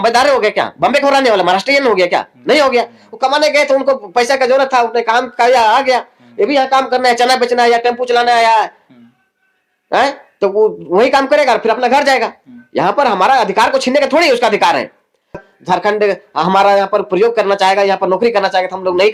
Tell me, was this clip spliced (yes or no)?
yes